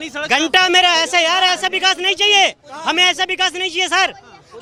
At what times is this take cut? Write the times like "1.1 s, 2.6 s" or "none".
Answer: none